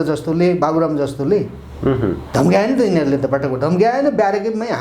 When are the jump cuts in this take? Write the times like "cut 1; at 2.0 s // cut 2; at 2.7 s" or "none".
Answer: none